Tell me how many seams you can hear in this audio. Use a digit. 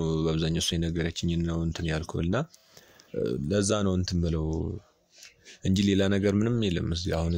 0